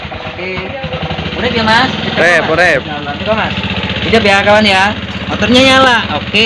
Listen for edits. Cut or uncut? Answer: uncut